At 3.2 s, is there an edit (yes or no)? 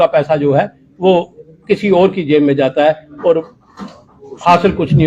no